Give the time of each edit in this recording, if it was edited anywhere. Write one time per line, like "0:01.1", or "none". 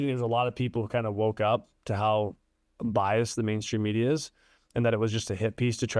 none